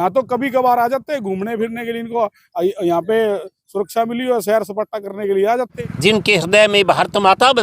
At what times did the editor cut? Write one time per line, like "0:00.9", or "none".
0:05.8